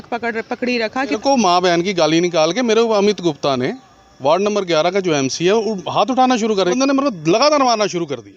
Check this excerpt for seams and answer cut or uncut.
cut